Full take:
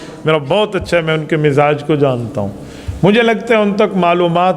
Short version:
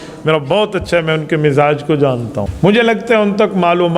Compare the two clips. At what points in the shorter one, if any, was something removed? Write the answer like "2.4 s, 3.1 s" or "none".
2.4 s